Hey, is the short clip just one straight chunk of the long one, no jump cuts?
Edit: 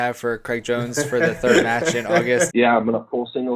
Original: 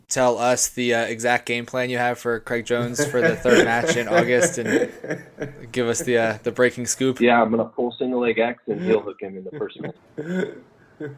no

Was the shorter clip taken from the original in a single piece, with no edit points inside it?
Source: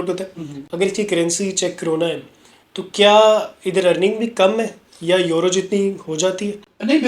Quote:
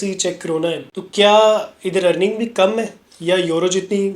no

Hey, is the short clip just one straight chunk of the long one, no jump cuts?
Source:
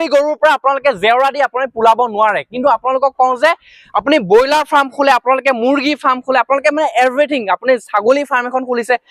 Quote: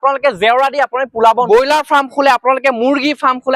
no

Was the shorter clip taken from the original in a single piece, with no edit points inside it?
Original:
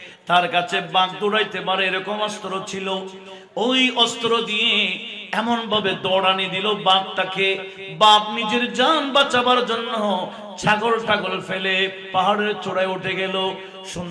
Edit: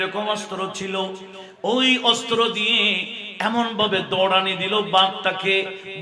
yes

